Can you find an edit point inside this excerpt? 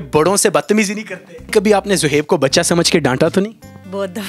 yes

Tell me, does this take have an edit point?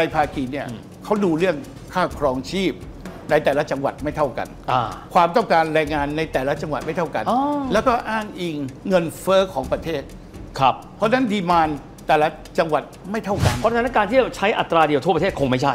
no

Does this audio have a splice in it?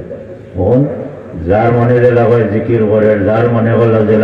no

